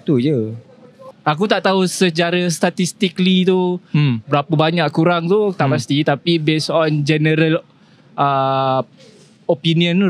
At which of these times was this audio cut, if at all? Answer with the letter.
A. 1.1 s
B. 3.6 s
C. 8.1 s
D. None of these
A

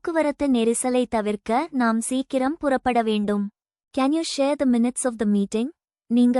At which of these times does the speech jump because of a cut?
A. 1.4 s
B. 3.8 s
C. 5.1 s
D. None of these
B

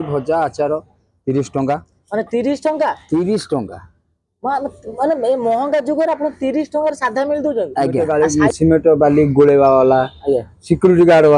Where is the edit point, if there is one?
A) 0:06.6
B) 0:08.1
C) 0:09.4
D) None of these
B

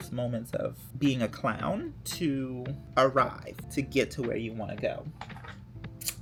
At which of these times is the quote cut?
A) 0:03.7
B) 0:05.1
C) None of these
C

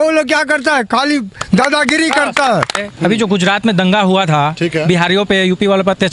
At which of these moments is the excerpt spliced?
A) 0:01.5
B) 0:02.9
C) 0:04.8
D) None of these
B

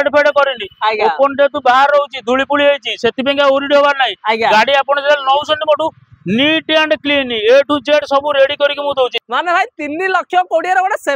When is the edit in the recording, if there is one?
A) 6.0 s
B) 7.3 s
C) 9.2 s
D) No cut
C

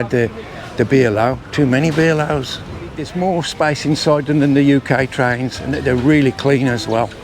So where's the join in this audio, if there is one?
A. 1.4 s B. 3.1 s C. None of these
B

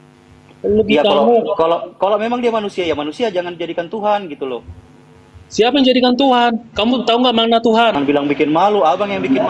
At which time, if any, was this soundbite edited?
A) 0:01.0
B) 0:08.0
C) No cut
B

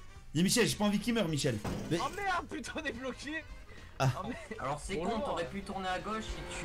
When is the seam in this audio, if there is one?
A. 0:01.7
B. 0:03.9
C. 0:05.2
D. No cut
A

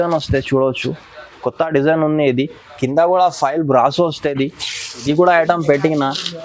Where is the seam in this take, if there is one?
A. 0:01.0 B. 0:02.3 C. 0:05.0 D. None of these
C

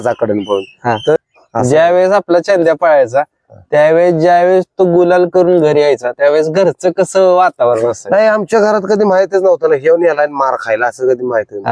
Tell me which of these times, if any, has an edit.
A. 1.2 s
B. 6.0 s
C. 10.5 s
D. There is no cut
A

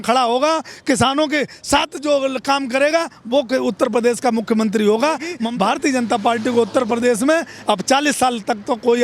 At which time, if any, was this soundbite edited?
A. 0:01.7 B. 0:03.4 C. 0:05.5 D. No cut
C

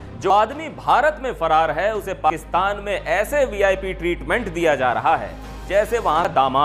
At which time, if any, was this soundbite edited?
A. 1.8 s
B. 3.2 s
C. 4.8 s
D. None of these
D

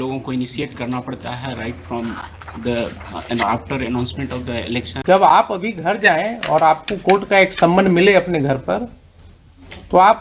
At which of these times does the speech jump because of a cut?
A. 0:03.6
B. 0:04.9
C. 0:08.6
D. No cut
B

